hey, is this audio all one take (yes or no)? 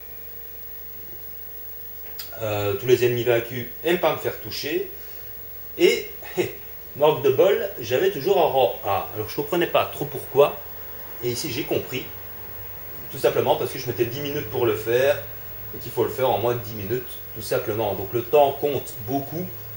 no